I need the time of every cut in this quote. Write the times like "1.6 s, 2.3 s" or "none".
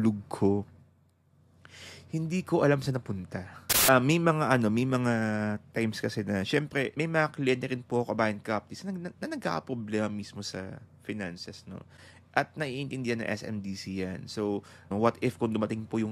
3.9 s, 14.9 s